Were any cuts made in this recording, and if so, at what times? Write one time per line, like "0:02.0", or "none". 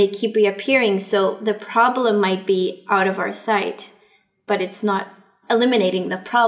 0:05.3